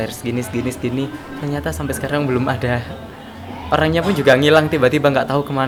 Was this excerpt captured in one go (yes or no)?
yes